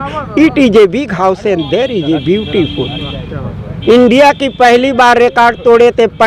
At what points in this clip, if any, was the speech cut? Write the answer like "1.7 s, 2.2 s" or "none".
none